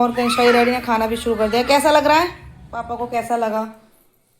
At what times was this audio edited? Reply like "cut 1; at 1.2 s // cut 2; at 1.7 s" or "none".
cut 1; at 3.1 s